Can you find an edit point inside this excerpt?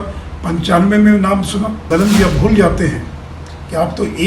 yes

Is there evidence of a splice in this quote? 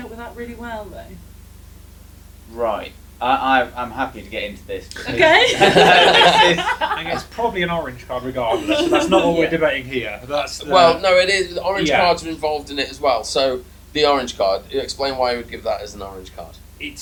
no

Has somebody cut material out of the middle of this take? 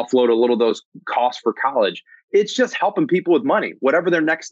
no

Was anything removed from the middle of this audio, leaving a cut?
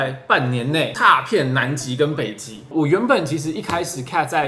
yes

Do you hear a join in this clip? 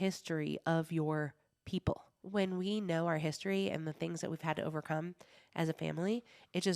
yes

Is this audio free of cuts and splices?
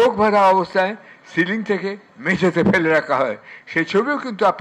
yes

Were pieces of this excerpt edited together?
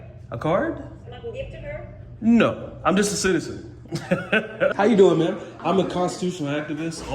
yes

